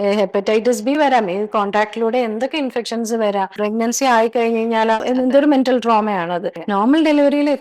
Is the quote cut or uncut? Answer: cut